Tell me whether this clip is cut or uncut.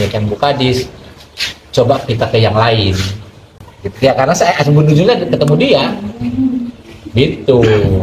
uncut